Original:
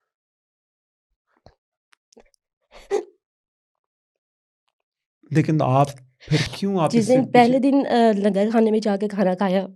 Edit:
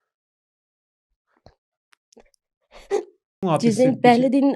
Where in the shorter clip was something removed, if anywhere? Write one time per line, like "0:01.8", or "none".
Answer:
0:03.4